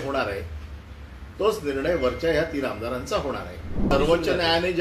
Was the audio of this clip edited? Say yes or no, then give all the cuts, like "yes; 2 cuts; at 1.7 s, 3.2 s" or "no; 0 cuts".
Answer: yes; 1 cut; at 3.9 s